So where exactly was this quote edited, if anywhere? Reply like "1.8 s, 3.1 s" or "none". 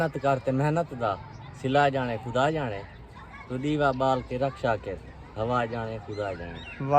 none